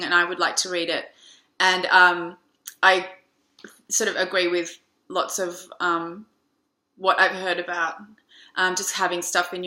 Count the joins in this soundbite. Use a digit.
0